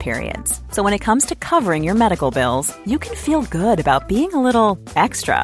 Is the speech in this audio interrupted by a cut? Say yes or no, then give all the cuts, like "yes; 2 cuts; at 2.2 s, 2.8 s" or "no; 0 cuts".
no; 0 cuts